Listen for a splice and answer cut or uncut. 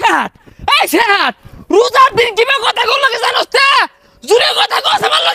uncut